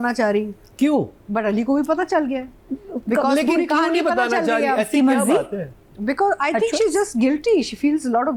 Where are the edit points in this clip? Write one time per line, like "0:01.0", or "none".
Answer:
none